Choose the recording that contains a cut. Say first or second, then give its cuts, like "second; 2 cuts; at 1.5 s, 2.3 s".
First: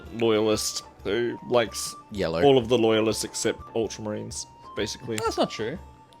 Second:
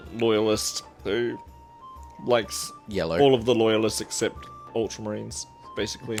first; 2 cuts; at 1.4 s, 3.6 s